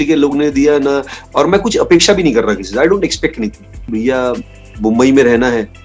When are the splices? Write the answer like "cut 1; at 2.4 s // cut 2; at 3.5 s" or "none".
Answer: cut 1; at 3.9 s